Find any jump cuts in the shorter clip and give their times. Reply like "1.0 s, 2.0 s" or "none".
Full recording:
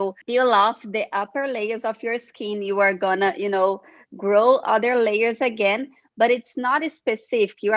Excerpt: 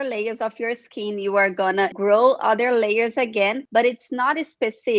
1.9 s, 3.6 s